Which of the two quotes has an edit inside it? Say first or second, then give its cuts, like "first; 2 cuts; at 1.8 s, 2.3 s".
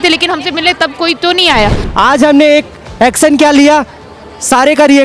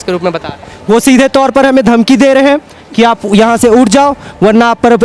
first; 1 cut; at 1.8 s